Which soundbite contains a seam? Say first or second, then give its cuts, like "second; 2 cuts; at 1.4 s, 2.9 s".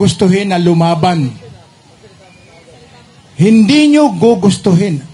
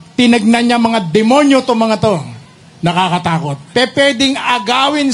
second; 1 cut; at 3.6 s